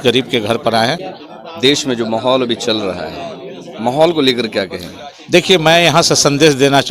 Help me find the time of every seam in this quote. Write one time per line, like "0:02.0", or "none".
0:01.1